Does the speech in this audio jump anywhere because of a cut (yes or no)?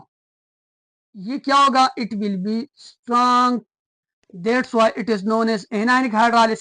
yes